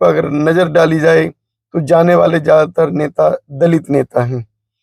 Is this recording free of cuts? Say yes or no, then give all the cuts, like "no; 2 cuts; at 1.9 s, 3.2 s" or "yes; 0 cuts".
yes; 0 cuts